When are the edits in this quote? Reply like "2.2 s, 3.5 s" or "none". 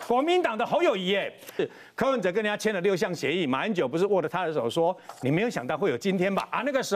1.6 s